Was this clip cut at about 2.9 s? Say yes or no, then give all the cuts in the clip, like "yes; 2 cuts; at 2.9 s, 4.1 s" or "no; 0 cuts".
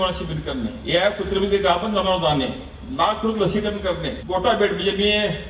no; 2 cuts; at 0.8 s, 4.1 s